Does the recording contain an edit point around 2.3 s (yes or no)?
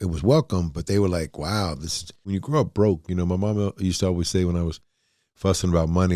yes